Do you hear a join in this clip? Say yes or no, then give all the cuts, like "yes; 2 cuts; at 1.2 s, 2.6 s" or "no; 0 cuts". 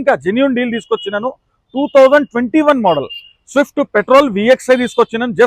no; 0 cuts